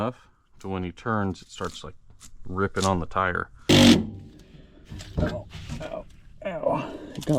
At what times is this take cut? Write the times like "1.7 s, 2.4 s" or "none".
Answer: 3.7 s